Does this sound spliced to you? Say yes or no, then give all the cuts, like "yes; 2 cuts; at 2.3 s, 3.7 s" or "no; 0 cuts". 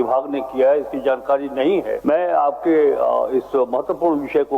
yes; 1 cut; at 2.0 s